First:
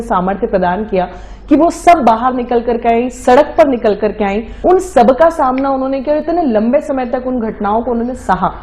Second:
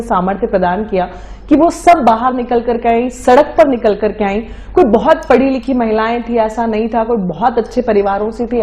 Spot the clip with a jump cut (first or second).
first